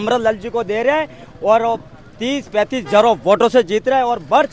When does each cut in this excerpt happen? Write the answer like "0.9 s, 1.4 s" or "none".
none